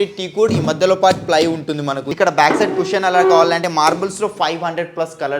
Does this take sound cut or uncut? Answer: cut